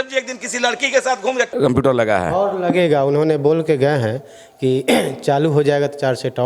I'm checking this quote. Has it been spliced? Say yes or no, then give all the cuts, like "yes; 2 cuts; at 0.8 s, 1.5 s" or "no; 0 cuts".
yes; 1 cut; at 1.5 s